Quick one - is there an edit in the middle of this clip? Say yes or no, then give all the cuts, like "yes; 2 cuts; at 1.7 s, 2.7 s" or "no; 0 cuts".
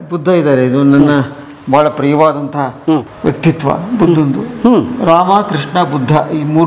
no; 0 cuts